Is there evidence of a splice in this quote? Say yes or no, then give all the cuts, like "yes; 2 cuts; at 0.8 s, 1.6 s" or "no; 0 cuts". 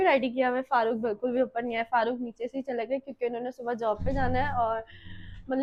no; 0 cuts